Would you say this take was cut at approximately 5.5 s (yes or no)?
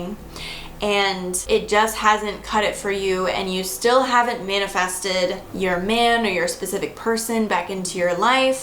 yes